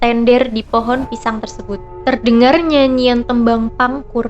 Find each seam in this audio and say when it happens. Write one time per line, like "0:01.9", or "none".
0:01.9

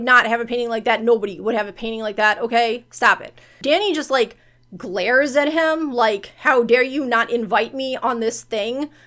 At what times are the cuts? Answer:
0:03.6

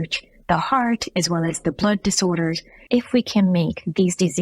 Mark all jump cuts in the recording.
0:02.7

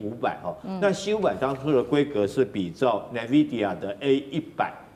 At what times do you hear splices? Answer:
none

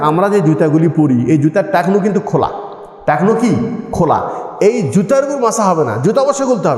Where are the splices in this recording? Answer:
none

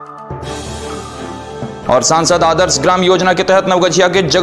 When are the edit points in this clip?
0:01.3

